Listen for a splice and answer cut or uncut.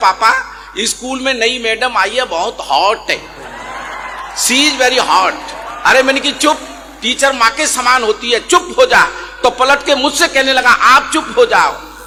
uncut